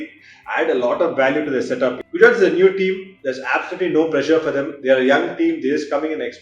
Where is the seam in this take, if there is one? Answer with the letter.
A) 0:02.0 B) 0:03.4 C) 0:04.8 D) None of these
A